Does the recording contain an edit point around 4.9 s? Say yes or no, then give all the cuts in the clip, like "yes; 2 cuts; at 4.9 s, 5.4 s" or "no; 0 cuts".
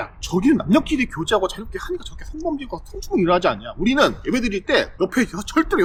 no; 0 cuts